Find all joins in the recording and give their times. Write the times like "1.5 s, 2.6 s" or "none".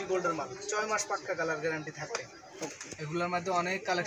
2.6 s